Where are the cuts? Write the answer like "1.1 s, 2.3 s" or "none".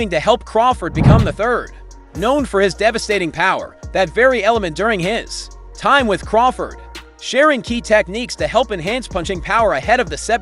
4.1 s

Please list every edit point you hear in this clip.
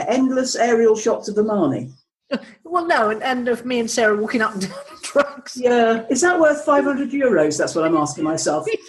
none

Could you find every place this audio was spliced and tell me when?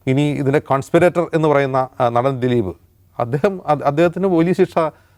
none

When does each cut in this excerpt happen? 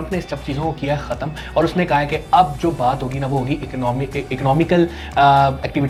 none

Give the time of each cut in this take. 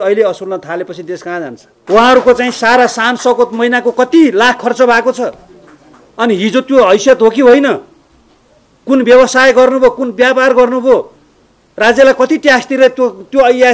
1.7 s

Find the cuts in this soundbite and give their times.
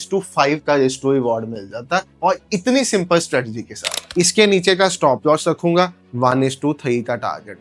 4.0 s

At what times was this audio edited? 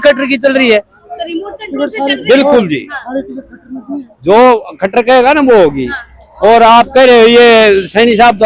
none

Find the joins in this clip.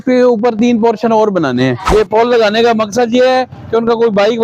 1.8 s

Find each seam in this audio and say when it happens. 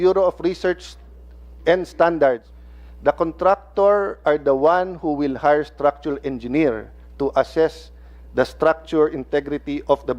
2.5 s

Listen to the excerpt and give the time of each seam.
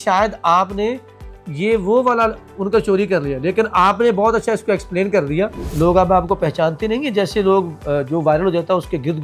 5.6 s

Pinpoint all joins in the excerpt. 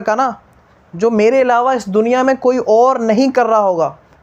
none

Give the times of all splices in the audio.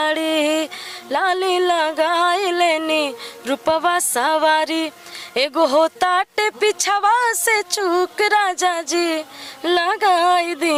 none

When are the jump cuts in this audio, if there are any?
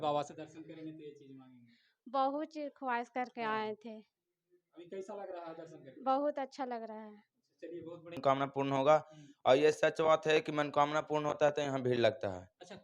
8.2 s

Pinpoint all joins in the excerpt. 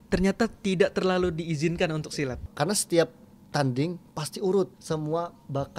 2.5 s, 4.8 s

